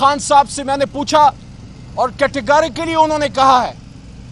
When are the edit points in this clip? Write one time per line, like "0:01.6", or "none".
none